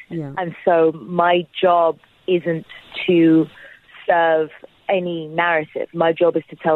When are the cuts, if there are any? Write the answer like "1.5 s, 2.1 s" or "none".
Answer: none